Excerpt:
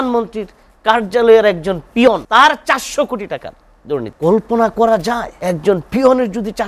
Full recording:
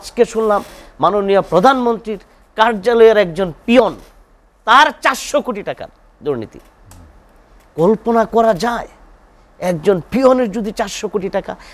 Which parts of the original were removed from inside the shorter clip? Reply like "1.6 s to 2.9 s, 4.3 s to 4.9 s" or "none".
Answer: 4.0 s to 4.6 s, 6.5 s to 7.7 s, 8.9 s to 9.5 s